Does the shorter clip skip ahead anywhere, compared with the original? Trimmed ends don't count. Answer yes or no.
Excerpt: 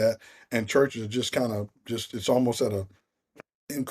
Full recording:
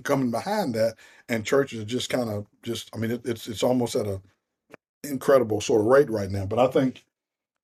yes